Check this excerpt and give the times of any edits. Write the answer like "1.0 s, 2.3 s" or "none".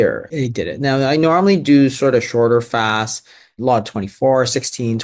none